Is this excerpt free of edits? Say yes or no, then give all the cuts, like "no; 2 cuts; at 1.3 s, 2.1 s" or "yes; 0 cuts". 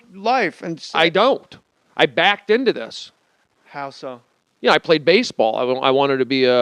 no; 1 cut; at 3.9 s